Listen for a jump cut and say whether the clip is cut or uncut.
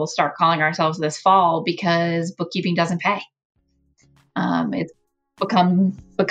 uncut